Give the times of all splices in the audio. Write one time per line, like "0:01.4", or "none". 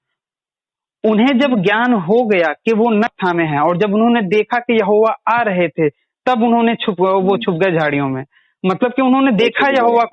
0:03.1